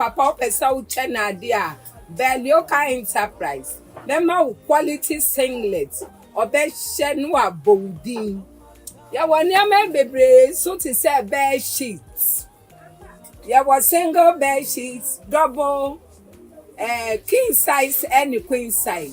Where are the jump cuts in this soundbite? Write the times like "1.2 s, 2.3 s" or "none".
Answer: none